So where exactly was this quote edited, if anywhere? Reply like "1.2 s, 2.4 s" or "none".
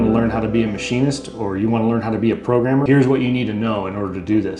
2.8 s